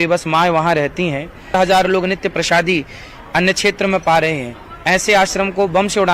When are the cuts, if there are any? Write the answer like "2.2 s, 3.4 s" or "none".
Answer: 1.5 s